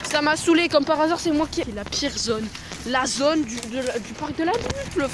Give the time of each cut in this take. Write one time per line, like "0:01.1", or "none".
0:01.7